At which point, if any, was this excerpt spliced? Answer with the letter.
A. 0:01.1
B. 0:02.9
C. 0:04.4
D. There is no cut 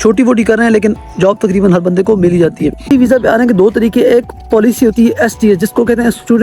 B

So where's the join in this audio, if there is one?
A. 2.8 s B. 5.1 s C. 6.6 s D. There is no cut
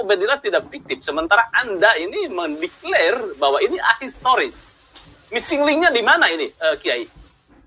D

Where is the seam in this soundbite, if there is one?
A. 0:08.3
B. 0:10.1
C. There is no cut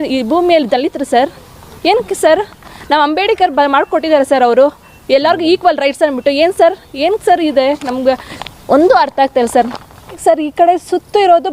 B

